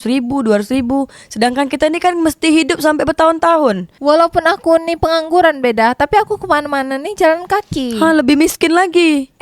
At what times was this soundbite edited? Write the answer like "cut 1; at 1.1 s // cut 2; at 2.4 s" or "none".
cut 1; at 3.9 s